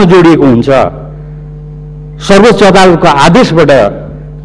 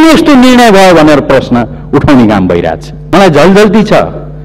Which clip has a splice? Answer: second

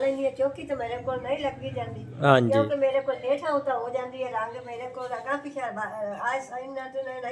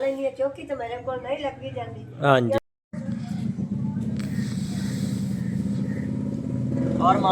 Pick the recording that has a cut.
second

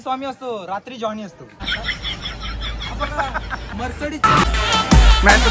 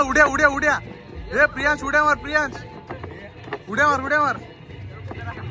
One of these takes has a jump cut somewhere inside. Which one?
first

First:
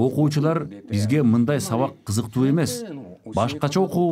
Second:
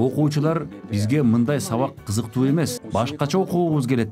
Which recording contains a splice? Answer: second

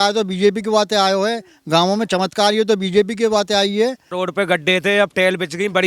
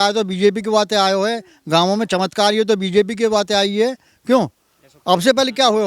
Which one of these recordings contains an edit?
first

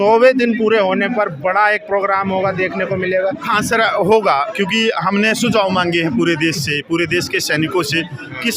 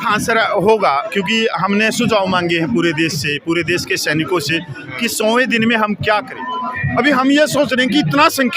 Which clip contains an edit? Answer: second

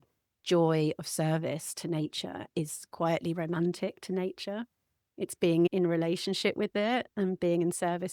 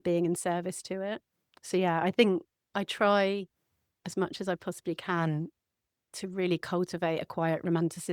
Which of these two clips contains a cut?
first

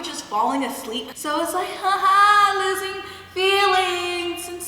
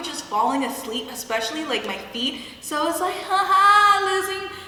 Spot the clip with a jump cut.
first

